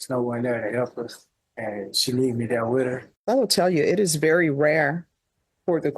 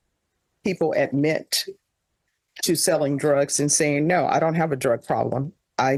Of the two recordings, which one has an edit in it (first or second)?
first